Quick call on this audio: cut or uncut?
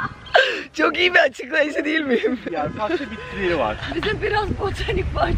uncut